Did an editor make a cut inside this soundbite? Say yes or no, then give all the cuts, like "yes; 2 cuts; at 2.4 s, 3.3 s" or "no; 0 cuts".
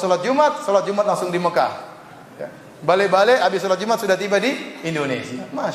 no; 0 cuts